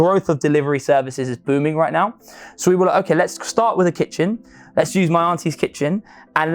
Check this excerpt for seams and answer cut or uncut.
uncut